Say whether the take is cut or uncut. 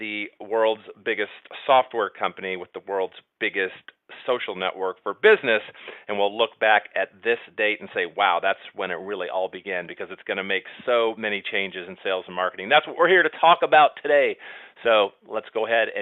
cut